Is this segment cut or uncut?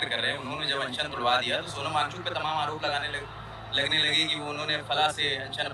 uncut